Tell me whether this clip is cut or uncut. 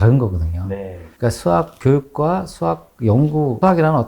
cut